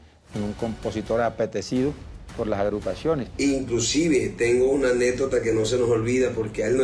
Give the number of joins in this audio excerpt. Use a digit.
1